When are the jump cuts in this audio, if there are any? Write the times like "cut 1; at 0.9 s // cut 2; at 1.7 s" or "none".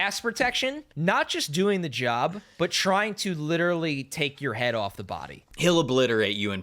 cut 1; at 0.9 s // cut 2; at 2.4 s // cut 3; at 5.6 s